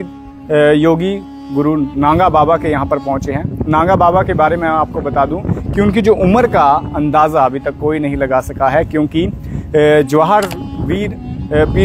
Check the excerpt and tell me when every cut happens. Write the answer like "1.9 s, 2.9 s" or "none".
none